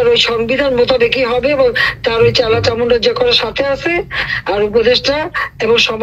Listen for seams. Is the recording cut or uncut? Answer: uncut